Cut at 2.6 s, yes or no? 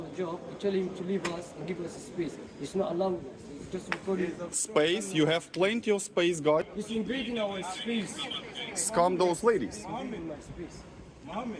no